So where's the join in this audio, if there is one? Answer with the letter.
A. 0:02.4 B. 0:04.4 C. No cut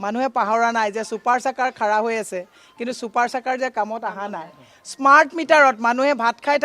C